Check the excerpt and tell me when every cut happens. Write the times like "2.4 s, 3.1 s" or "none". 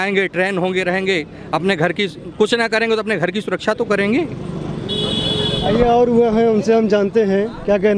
none